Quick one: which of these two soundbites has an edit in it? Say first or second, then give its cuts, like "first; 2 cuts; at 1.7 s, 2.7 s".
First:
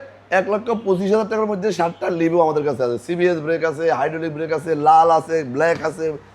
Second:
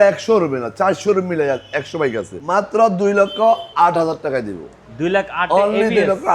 second; 1 cut; at 2.4 s